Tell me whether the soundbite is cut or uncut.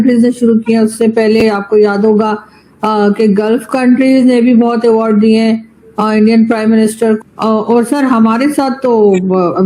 cut